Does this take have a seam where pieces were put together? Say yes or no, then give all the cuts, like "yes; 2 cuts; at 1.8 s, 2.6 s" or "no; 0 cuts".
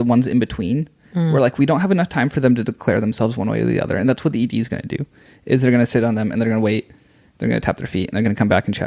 no; 0 cuts